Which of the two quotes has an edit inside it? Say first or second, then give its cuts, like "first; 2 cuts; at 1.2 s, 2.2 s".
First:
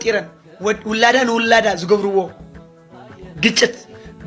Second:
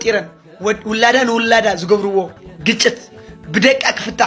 second; 1 cut; at 2.4 s